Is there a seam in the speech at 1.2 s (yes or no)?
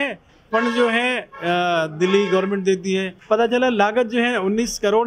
no